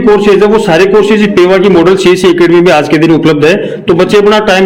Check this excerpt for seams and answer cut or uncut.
uncut